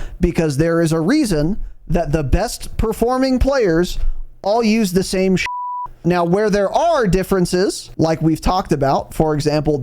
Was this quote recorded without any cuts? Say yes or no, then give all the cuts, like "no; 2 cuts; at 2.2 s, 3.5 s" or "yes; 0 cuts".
no; 2 cuts; at 6.0 s, 7.8 s